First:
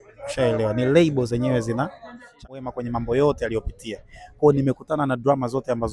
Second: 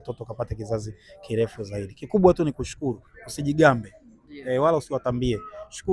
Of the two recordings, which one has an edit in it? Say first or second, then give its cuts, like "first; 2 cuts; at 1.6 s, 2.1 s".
first; 1 cut; at 2.6 s